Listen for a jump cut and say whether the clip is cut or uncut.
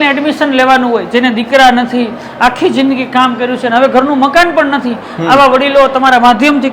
uncut